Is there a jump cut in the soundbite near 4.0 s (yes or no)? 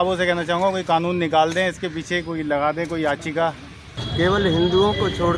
yes